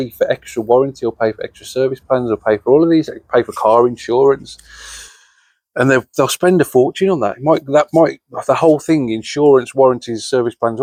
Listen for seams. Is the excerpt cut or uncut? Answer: uncut